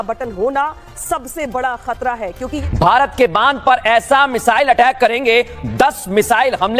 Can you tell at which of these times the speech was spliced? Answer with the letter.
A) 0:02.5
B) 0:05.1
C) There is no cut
A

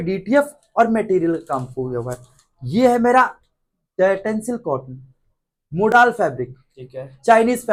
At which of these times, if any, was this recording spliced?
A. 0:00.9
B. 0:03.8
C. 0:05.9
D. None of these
D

